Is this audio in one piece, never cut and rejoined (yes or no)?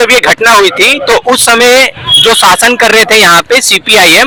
yes